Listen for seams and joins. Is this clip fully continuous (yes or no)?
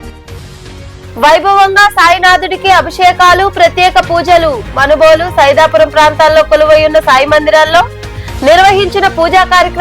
no